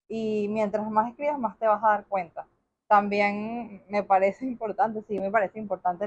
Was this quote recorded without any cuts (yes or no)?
yes